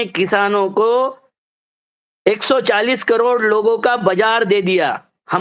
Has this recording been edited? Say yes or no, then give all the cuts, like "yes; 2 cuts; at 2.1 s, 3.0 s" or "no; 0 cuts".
no; 0 cuts